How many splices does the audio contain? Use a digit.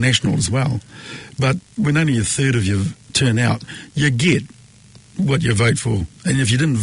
2